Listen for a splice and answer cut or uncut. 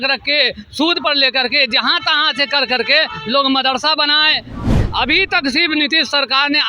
cut